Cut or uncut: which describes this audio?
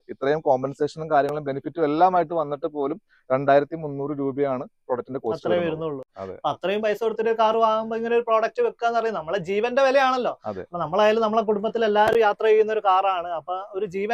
uncut